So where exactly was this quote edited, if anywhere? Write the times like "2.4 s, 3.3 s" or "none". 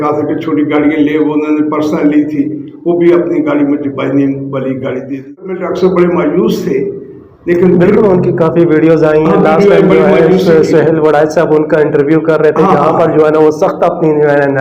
5.4 s